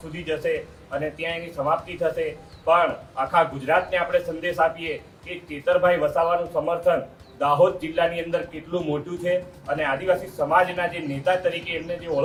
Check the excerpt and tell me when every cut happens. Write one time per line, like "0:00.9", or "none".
none